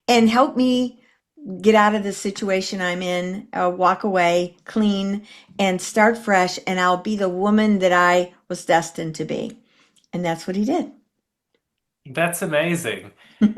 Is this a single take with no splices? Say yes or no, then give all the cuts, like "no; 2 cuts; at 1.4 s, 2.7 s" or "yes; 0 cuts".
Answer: yes; 0 cuts